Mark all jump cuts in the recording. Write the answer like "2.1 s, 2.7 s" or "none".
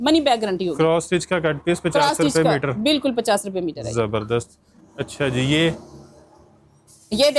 none

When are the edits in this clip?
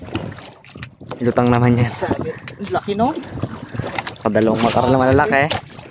none

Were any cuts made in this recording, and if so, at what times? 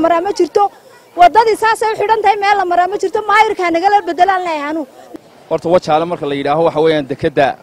5.0 s

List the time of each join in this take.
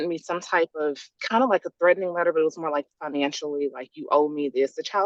1.1 s

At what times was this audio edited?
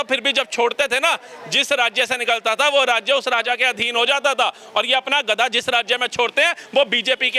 none

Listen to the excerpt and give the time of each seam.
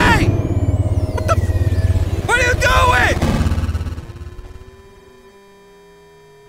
5.3 s

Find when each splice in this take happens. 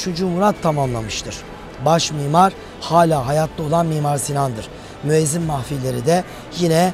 none

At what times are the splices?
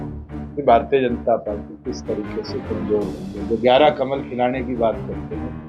none

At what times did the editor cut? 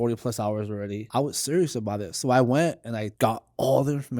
1.0 s, 3.1 s

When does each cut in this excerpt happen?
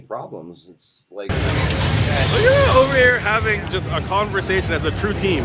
1.3 s

